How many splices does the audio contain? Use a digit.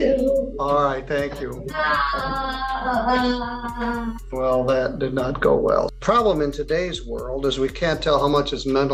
2